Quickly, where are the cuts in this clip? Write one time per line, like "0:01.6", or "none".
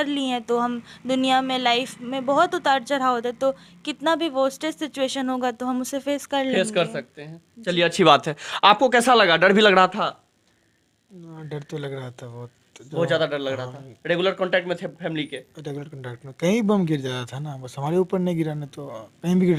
none